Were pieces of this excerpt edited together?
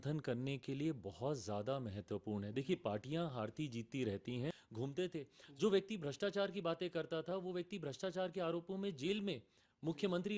yes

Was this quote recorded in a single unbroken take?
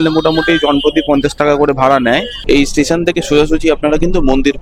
no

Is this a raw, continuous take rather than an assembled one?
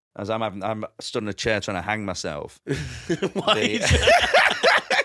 yes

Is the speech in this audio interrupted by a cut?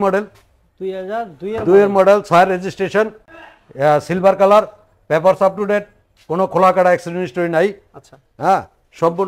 no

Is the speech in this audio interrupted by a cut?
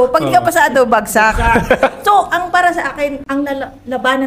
no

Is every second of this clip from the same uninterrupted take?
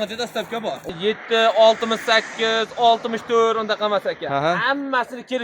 no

